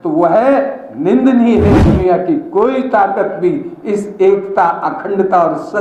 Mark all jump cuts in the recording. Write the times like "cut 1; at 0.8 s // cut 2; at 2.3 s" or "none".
cut 1; at 1.8 s